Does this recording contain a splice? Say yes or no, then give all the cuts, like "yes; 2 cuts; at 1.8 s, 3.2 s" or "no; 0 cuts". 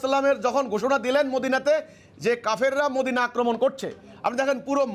no; 0 cuts